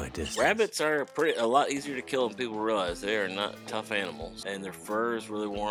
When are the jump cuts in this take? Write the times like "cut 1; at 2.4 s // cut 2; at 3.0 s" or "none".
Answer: none